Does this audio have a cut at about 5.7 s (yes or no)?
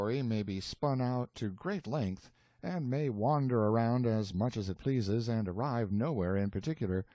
no